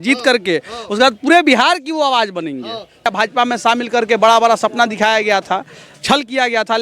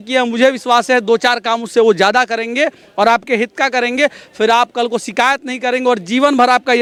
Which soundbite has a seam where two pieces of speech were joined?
first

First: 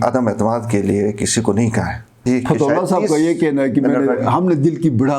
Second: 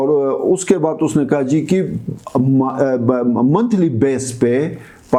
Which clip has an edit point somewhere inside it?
first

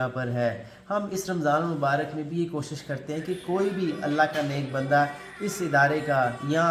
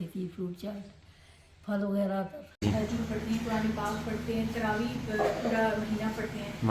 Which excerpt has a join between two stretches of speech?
second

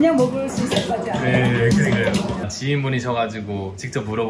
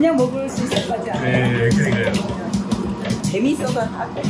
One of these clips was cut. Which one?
first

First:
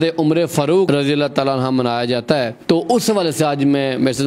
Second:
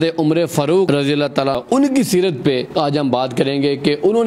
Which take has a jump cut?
second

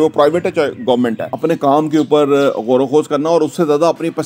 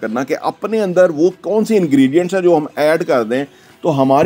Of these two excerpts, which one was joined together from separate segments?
first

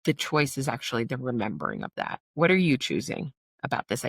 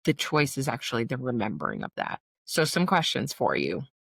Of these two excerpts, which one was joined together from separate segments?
first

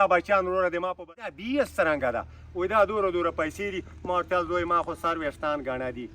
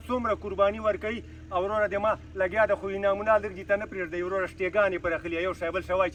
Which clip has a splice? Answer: first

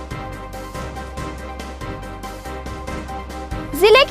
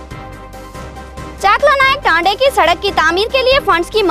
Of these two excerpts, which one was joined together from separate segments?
first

